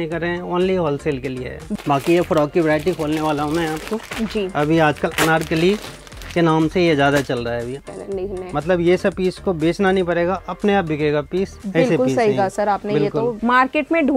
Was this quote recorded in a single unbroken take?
no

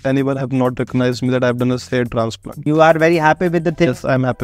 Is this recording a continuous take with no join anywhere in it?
no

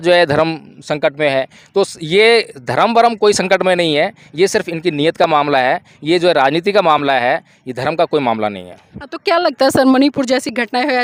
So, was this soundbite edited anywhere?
no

